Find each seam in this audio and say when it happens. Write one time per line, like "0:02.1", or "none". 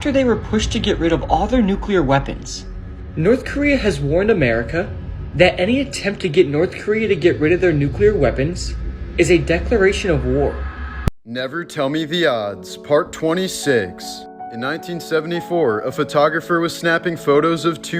0:11.0

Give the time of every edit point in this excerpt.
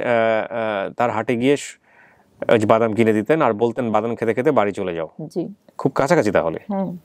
none

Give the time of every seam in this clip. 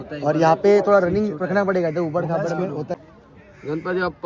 0:02.9

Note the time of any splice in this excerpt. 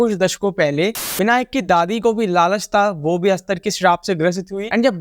0:01.0

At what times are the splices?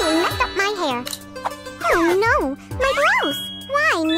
0:01.7

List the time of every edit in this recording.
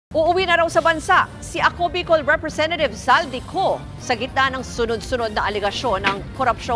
none

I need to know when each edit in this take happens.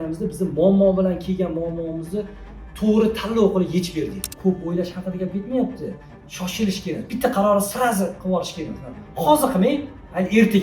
0:04.3

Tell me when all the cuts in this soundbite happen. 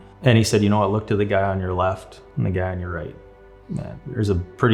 none

